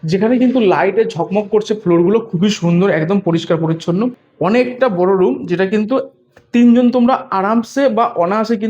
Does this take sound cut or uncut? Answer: cut